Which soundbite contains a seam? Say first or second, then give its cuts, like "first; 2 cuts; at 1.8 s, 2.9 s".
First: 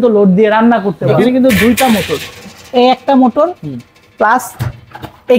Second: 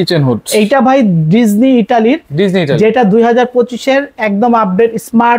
first; 1 cut; at 1.3 s